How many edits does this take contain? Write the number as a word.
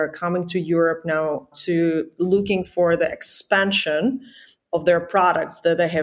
one